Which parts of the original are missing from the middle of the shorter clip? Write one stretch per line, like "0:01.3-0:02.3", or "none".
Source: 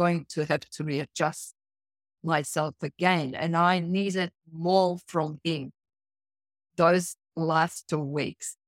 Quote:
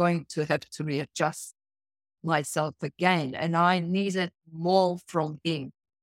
none